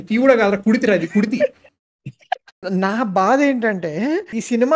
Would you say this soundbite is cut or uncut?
uncut